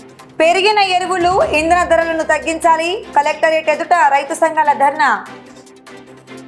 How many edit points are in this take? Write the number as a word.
zero